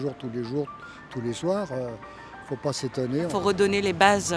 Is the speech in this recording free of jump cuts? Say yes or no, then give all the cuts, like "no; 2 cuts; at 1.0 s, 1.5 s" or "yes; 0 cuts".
no; 1 cut; at 3.3 s